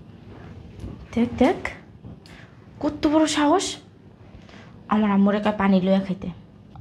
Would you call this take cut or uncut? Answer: uncut